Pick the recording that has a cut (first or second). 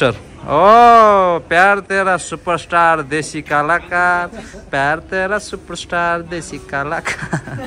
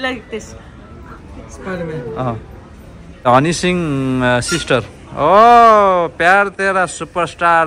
second